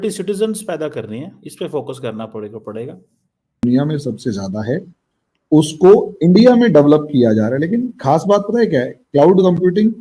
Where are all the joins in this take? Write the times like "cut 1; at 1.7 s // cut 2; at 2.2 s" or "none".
cut 1; at 3.6 s